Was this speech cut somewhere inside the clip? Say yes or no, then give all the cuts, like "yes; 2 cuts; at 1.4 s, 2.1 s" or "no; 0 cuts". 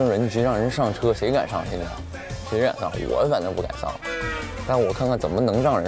no; 0 cuts